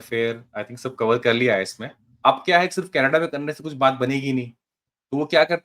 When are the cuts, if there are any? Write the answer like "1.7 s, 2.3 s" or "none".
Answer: 2.1 s